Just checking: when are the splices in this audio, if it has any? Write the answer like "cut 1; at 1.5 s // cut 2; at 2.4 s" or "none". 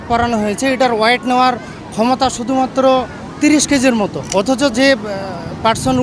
cut 1; at 4.2 s